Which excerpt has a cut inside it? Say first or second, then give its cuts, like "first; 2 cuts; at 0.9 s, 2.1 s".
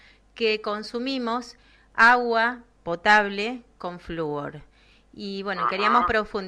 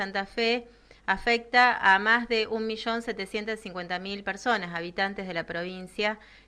second; 1 cut; at 1.3 s